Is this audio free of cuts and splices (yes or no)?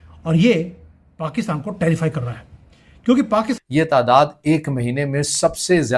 no